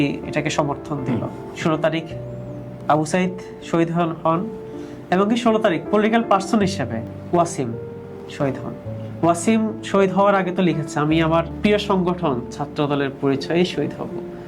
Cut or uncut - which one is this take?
cut